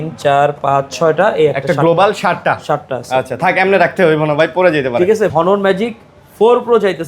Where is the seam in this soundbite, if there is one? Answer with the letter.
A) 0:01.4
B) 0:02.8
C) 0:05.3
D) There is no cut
C